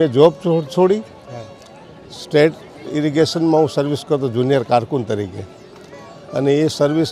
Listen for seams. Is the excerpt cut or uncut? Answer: uncut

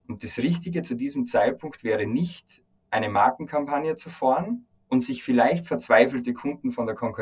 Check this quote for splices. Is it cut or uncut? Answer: uncut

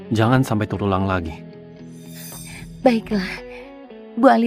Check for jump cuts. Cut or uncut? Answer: cut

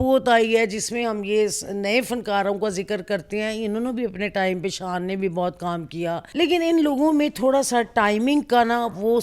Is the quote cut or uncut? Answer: cut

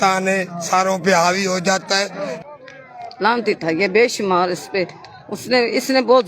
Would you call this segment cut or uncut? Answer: cut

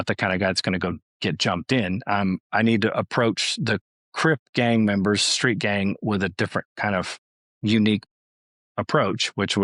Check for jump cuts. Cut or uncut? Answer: uncut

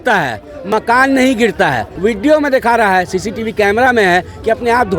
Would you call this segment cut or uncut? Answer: cut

